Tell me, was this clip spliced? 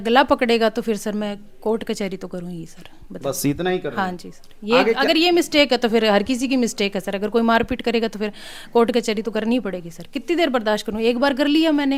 no; 0 cuts

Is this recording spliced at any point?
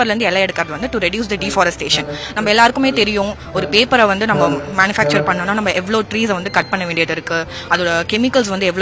no; 0 cuts

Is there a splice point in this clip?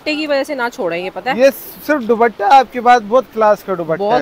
no; 0 cuts

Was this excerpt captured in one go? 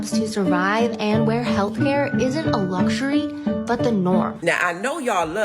no; 1 cut; at 4.3 s

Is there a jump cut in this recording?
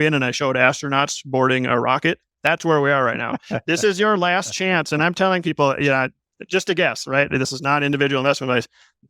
no; 0 cuts

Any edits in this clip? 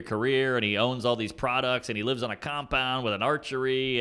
no; 0 cuts

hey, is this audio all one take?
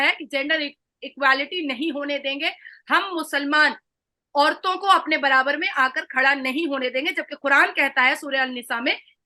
yes; 0 cuts

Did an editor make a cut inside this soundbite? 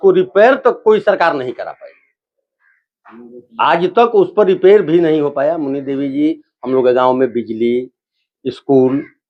no; 0 cuts

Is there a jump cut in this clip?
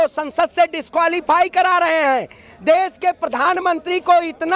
no; 0 cuts

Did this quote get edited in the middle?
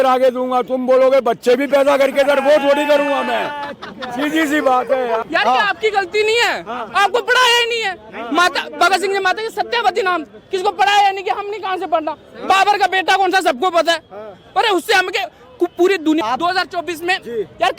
yes; 2 cuts; at 5.2 s, 16.2 s

